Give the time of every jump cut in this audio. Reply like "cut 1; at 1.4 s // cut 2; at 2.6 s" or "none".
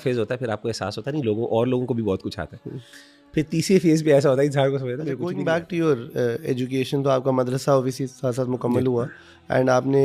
cut 1; at 5.2 s